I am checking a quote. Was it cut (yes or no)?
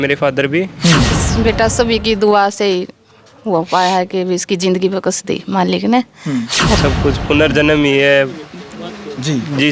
yes